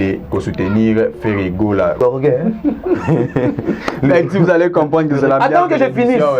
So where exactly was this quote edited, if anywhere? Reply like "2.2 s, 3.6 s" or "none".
2.0 s